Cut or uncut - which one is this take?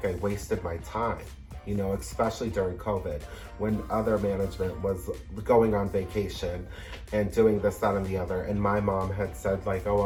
uncut